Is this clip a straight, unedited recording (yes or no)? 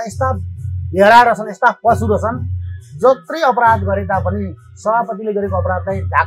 yes